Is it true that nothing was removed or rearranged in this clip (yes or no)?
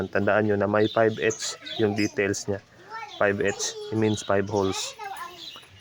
yes